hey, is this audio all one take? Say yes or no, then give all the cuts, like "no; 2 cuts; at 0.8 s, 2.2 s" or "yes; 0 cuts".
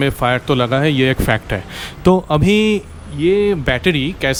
yes; 0 cuts